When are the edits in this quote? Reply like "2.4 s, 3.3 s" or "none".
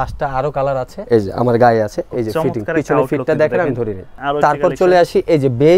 1.0 s, 4.1 s